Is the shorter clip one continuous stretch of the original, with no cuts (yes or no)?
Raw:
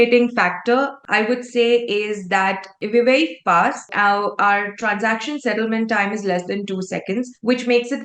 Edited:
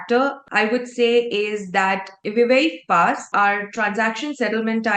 no